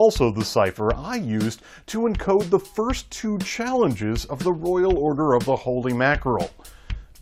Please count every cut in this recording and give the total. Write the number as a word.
zero